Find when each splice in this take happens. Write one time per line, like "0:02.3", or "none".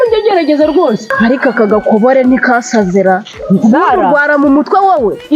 0:01.1